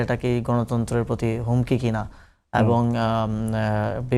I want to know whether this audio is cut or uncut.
uncut